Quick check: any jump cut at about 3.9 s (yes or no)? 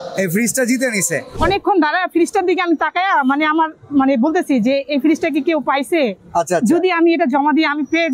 no